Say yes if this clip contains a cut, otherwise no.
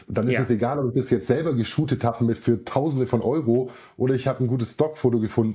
no